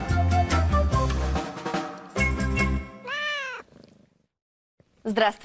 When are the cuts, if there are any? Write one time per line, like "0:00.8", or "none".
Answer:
0:01.1